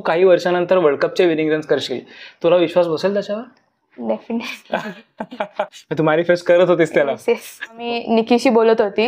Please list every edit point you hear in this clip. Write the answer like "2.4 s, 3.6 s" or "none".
7.8 s

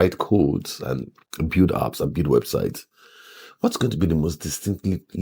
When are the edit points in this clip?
none

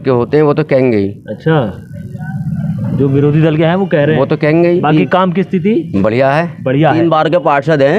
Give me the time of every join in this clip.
none

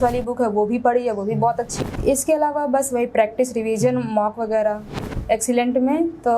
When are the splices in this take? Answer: 1.7 s, 5.0 s

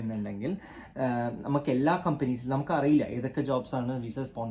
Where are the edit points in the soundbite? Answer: none

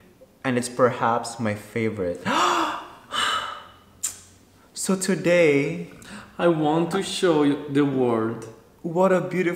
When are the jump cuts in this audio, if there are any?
none

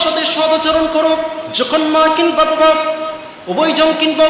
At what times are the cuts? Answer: 1.4 s

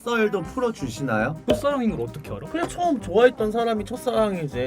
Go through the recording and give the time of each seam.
1.4 s

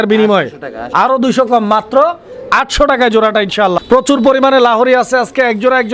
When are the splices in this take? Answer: 3.9 s

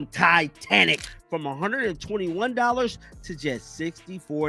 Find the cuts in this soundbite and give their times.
1.0 s

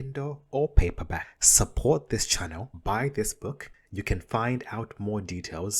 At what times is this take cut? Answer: none

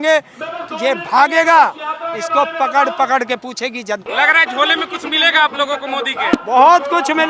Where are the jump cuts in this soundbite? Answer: 4.1 s

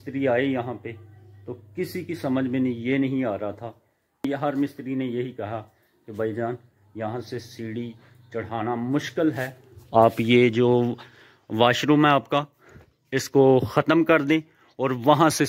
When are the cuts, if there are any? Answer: 4.3 s

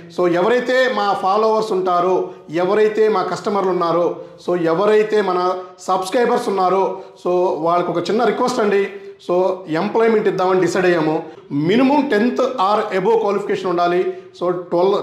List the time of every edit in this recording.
11.4 s

